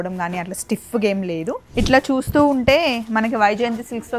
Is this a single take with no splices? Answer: no; 1 cut; at 1.6 s

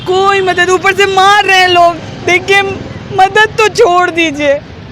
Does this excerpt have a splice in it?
no; 0 cuts

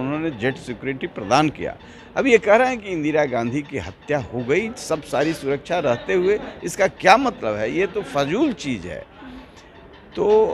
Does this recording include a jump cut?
no; 0 cuts

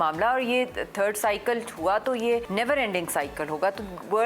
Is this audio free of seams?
no; 1 cut; at 2.5 s

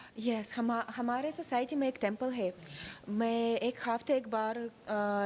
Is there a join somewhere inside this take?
no; 0 cuts

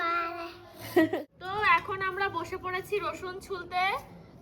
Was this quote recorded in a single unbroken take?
no; 1 cut; at 1.1 s

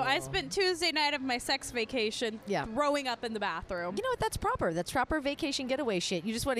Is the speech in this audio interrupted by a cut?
no; 0 cuts

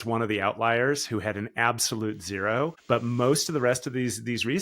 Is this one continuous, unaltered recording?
no; 1 cut; at 2.8 s

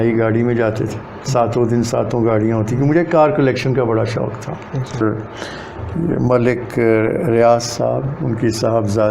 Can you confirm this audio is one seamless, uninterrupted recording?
no; 1 cut; at 5.0 s

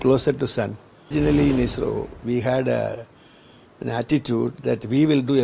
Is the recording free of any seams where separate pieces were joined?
no; 1 cut; at 1.1 s

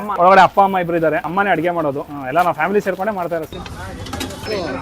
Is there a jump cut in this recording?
yes; 1 cut; at 3.6 s

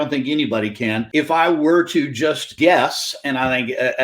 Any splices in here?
yes; 2 cuts; at 1.0 s, 2.5 s

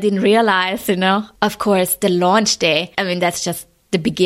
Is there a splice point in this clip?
yes; 2 cuts; at 1.3 s, 2.9 s

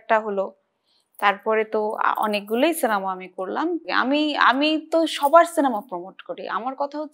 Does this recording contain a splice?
yes; 1 cut; at 3.9 s

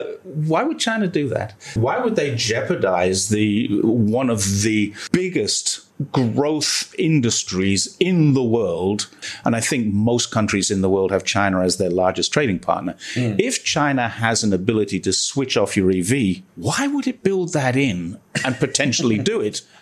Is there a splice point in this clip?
yes; 3 cuts; at 1.7 s, 5.0 s, 9.2 s

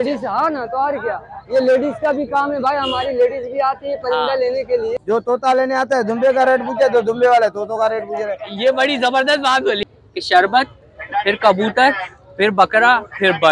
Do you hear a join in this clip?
yes; 2 cuts; at 4.9 s, 9.8 s

